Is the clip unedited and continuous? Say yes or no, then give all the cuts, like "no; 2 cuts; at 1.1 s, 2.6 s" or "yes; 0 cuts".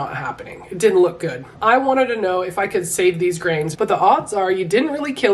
no; 2 cuts; at 1.5 s, 3.7 s